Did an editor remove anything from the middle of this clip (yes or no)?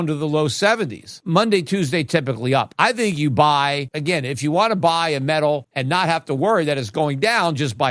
yes